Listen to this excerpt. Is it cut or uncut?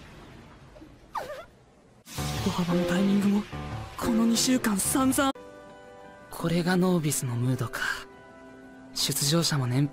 uncut